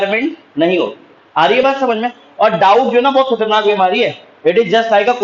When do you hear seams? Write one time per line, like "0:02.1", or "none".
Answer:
none